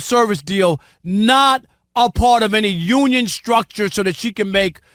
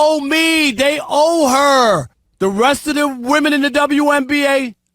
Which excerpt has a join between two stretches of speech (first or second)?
second